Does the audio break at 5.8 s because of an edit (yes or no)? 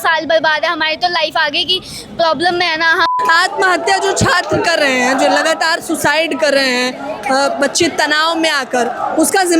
no